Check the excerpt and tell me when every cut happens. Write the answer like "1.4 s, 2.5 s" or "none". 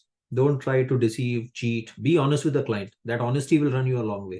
none